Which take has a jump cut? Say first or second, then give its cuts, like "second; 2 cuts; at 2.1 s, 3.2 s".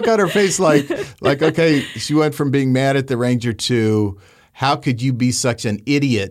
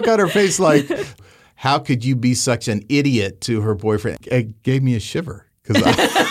second; 2 cuts; at 1.2 s, 4.2 s